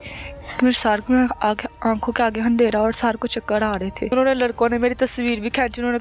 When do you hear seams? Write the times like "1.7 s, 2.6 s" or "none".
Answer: 4.1 s